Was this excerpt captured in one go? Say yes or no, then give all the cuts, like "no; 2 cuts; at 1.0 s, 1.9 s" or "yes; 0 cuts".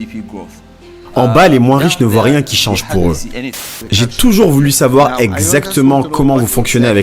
no; 2 cuts; at 1.2 s, 3.3 s